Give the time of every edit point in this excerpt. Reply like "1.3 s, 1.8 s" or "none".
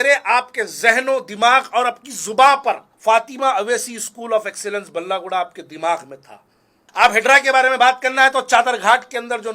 2.9 s, 6.5 s